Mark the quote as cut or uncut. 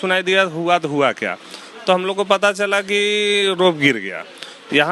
uncut